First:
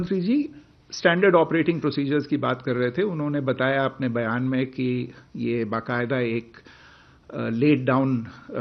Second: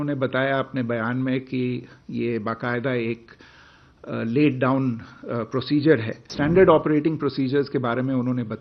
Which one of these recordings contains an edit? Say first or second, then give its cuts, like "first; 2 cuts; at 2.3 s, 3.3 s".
second; 1 cut; at 6.3 s